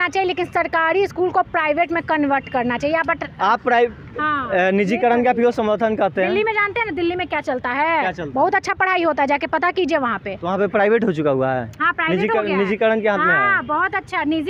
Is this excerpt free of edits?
yes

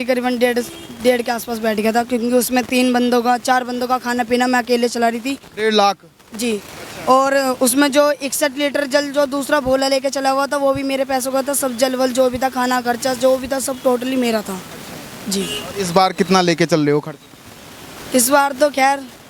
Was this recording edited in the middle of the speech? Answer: no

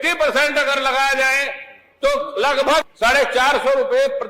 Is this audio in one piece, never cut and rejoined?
no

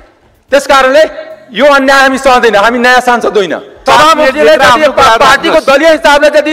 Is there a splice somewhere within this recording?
yes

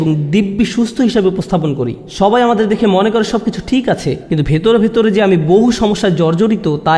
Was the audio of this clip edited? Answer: no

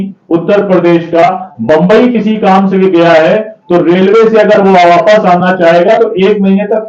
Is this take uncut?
yes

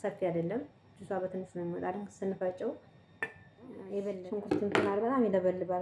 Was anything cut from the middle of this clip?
yes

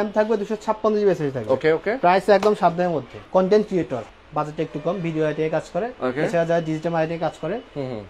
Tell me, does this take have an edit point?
yes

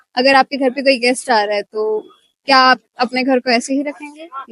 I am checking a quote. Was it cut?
no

